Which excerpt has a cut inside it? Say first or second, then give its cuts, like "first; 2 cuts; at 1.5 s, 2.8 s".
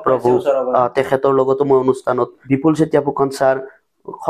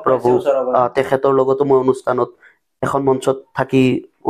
first; 1 cut; at 2.4 s